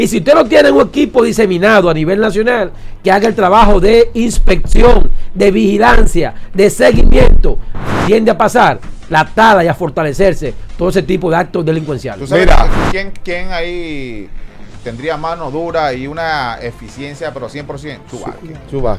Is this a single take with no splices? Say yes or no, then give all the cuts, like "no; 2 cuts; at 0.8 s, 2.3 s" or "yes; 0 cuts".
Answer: yes; 0 cuts